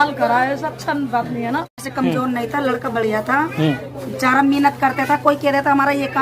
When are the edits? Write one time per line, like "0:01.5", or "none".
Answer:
0:01.8